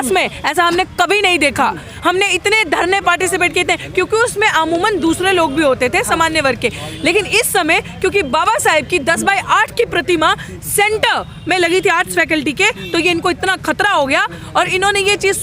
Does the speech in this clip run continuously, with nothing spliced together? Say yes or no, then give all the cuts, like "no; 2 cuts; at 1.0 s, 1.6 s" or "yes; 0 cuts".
yes; 0 cuts